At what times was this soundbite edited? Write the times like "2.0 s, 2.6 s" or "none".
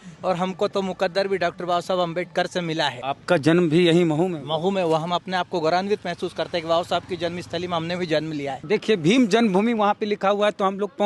3.0 s, 8.6 s

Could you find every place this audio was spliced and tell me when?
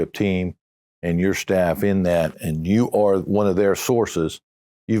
2.4 s

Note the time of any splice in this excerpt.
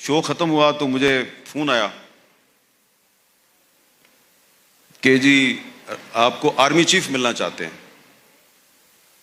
none

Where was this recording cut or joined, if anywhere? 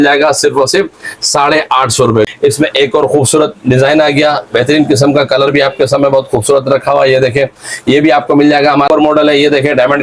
2.3 s, 8.9 s

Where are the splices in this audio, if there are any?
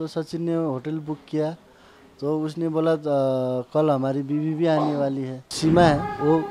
5.5 s

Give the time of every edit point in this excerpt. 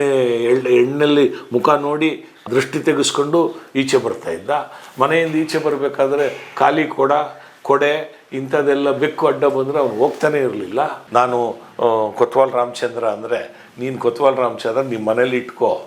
2.4 s, 11.0 s

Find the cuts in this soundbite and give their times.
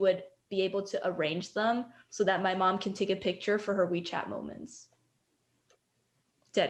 none

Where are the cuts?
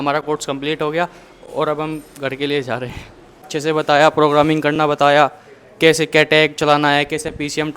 3.5 s

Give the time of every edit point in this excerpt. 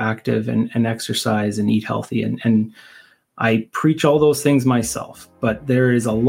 none

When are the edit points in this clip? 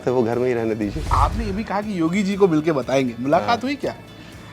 1.1 s

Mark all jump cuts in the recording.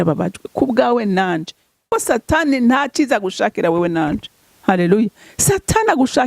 1.8 s

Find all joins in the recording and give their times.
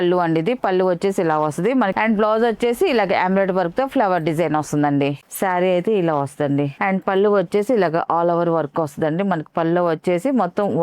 1.9 s, 5.2 s, 6.7 s

